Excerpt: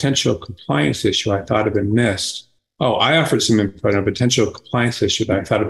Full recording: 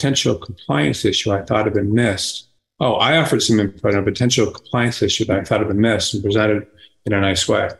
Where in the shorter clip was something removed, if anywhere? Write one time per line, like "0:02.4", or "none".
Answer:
none